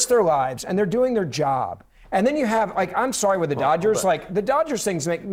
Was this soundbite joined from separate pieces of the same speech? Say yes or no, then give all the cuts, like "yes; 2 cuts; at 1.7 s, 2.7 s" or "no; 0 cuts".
no; 0 cuts